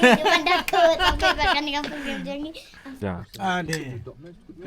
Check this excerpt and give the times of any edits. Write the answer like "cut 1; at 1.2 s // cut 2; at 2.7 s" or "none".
cut 1; at 3.0 s